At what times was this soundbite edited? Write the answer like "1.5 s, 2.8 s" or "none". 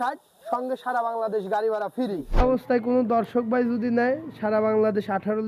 2.4 s

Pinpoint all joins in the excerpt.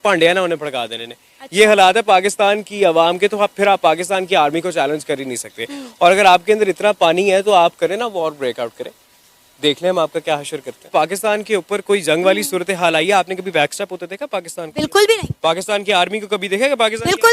10.8 s

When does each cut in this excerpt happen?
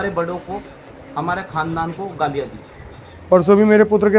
3.1 s

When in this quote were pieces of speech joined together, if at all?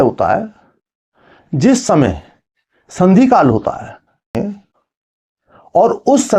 4.4 s

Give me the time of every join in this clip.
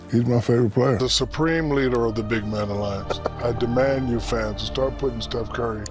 1.0 s

